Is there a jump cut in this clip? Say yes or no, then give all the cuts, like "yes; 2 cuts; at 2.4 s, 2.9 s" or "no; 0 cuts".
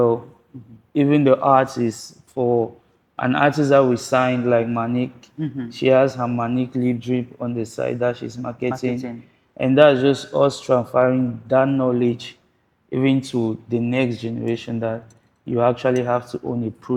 no; 0 cuts